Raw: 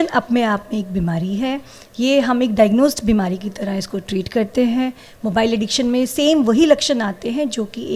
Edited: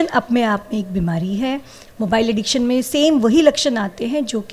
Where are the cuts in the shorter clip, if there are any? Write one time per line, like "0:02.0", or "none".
0:01.8